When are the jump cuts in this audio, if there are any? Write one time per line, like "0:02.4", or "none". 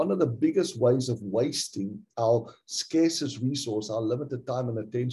none